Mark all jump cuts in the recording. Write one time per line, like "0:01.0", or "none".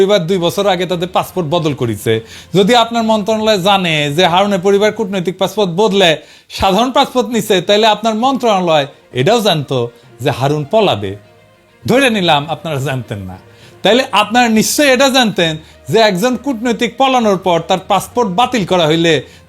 none

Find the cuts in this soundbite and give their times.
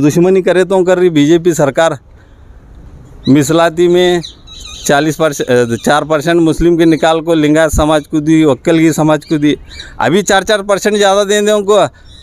none

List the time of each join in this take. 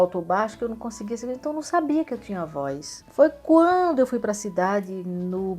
none

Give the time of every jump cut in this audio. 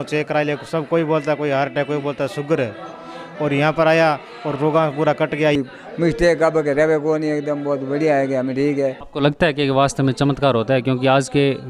0:05.5
0:09.0

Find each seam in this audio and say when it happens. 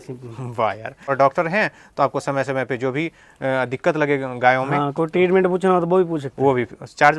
0:01.1

